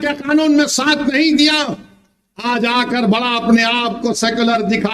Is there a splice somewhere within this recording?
no; 0 cuts

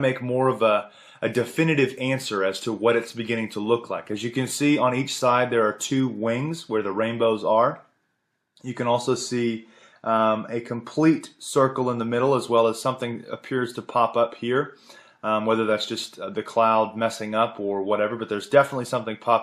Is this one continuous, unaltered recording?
yes; 0 cuts

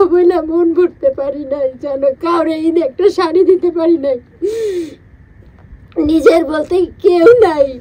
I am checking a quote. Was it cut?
no; 0 cuts

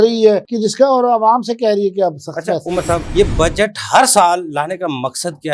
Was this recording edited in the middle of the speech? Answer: yes; 1 cut; at 3.0 s

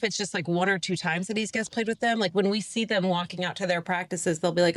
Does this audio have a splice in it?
no; 0 cuts

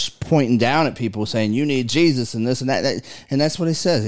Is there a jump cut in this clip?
no; 0 cuts

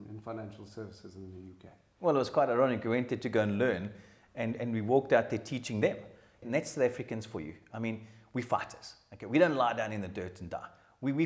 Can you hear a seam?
yes; 1 cut; at 6.4 s

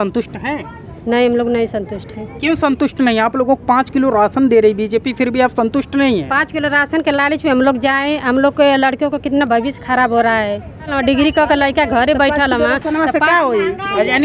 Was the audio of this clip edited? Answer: yes; 1 cut; at 10.9 s

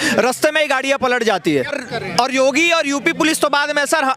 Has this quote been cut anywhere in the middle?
yes; 1 cut; at 1.7 s

